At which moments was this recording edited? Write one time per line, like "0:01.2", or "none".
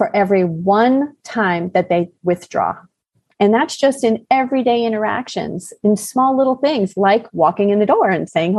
0:03.1